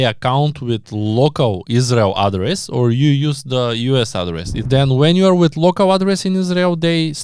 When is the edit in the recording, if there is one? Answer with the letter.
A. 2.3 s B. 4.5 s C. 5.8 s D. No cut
B